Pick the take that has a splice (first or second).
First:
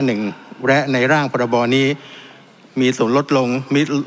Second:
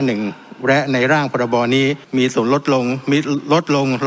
second